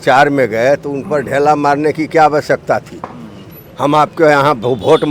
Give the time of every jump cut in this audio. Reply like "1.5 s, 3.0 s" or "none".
none